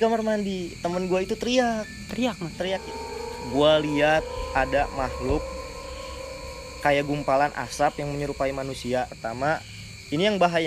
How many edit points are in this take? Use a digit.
2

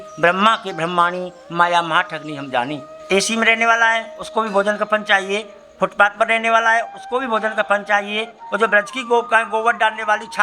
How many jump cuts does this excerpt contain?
2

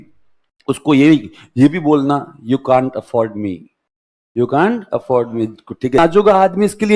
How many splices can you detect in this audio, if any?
1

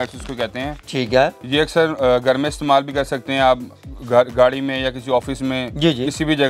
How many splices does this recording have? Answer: 0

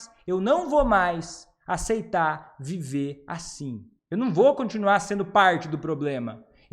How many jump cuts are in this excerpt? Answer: 1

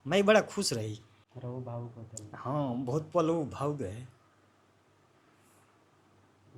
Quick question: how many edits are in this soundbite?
1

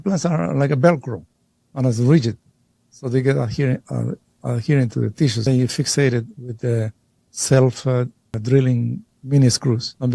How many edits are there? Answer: 3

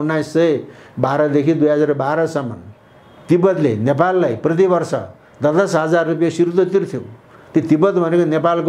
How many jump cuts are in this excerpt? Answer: 0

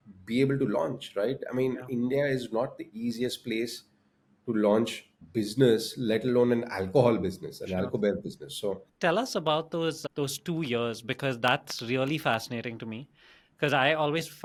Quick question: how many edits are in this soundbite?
0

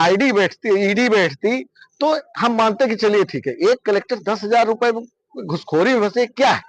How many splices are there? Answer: 0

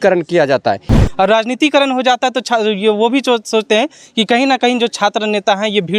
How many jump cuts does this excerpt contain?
1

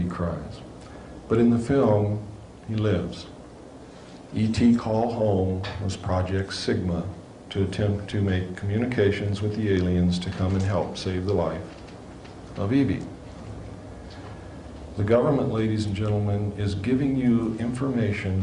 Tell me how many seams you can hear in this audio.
1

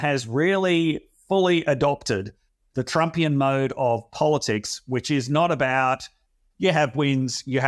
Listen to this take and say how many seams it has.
0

